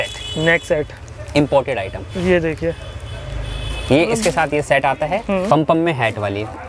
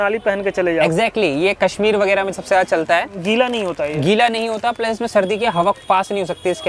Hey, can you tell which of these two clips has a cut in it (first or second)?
first